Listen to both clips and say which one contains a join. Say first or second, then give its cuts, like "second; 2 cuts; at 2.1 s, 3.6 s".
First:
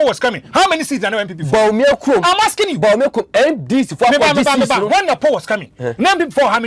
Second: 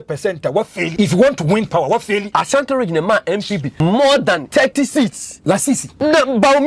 second; 5 cuts; at 0.9 s, 2.3 s, 3.7 s, 4.4 s, 5.6 s